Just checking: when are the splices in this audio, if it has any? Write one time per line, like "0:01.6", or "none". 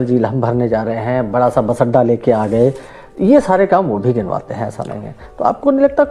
none